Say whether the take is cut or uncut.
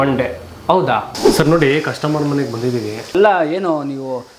cut